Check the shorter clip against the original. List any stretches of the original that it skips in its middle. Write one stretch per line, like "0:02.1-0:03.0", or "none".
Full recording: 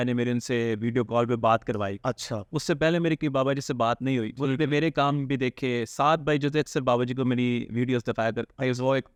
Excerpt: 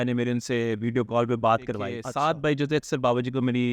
0:02.0-0:05.8